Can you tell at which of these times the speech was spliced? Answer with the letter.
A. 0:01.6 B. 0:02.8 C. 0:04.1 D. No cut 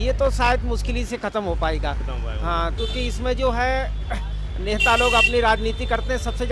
D